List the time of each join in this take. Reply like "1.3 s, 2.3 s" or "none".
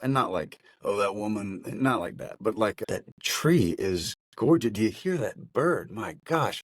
2.8 s